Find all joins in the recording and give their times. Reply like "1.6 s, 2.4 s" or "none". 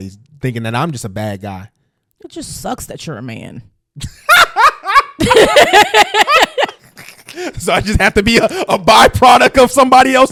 none